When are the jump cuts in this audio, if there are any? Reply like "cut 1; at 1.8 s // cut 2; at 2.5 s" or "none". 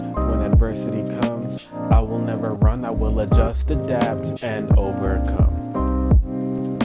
none